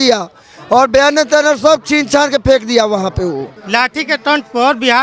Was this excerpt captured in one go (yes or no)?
no